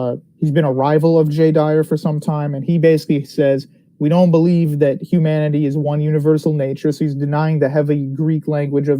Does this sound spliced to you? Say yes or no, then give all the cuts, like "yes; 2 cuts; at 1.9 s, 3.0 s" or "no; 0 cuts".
yes; 1 cut; at 2.8 s